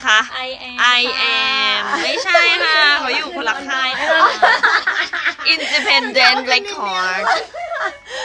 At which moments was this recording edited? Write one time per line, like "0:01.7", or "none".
none

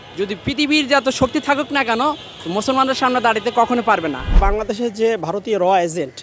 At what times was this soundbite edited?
0:04.4

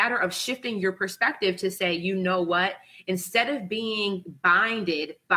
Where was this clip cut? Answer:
none

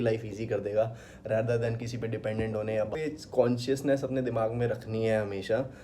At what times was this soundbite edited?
0:03.0

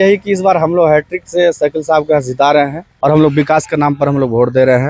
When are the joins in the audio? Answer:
0:02.8

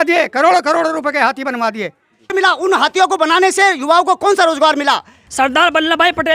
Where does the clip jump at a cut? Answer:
0:02.3
0:05.2

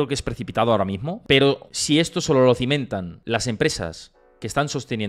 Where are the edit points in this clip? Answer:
0:01.1
0:01.7
0:03.1

